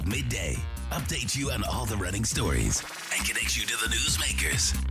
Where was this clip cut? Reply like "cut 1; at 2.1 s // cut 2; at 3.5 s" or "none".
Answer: none